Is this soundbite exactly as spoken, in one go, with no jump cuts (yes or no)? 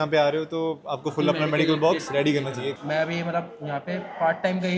no